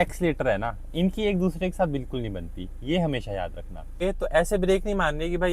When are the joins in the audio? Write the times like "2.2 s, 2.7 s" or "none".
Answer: 4.0 s